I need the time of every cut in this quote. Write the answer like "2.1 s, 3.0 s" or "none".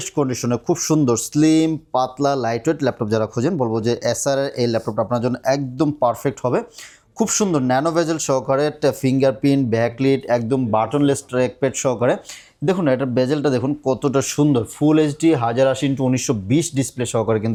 none